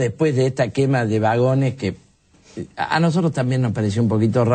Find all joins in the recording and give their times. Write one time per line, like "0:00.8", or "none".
none